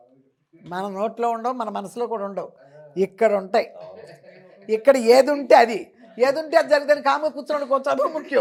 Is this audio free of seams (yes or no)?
yes